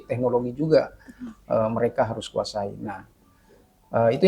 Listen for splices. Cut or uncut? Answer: uncut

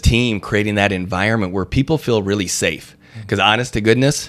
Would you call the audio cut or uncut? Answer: uncut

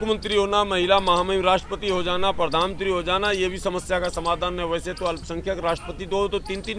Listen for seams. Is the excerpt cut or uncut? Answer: uncut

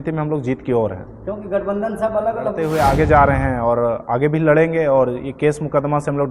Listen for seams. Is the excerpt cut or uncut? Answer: cut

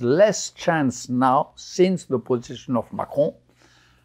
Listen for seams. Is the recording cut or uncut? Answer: uncut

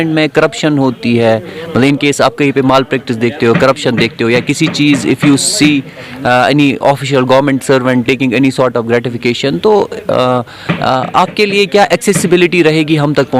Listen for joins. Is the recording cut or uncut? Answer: uncut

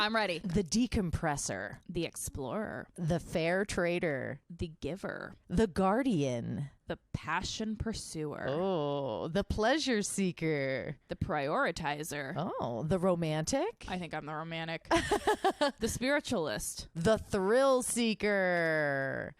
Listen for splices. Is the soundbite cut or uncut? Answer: uncut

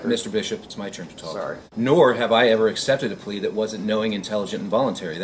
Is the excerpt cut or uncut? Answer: uncut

